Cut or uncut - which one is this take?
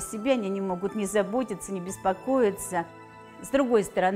cut